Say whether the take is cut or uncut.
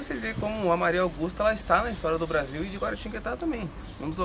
uncut